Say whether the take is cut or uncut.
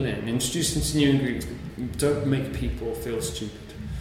cut